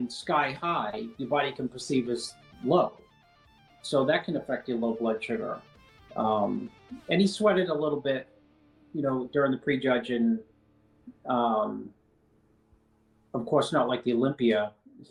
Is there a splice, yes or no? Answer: no